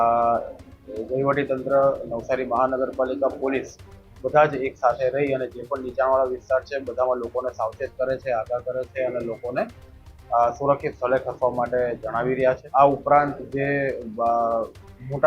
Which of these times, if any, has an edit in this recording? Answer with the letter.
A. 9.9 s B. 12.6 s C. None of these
B